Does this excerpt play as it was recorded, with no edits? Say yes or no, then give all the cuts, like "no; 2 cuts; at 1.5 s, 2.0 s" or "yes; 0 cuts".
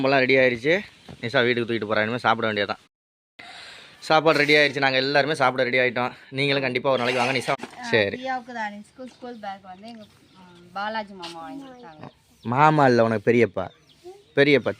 no; 2 cuts; at 2.8 s, 7.6 s